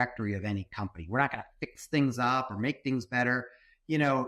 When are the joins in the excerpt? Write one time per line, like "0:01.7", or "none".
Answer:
none